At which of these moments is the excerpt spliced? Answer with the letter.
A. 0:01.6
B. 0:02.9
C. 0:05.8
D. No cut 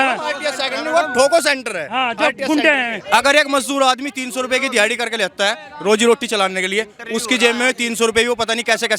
B